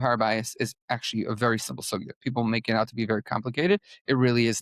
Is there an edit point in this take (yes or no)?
no